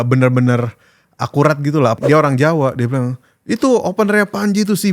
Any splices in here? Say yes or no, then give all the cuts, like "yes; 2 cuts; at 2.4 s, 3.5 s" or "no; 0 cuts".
yes; 1 cut; at 2.0 s